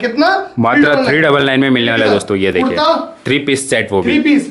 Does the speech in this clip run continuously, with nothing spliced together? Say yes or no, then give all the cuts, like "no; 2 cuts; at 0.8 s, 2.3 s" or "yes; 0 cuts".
yes; 0 cuts